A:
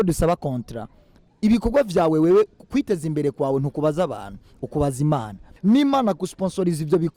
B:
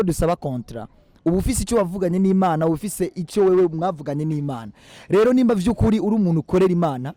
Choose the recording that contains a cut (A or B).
A